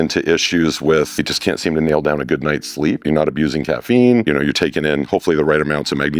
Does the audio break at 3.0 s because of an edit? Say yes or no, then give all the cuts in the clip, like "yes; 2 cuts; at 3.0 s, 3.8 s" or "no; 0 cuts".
yes; 3 cuts; at 1.2 s, 3.0 s, 4.2 s